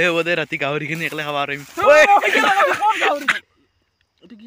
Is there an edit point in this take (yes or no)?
yes